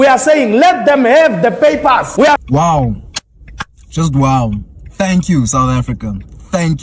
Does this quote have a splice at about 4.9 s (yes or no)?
no